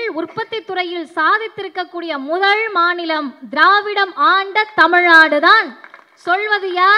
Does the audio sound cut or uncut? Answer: uncut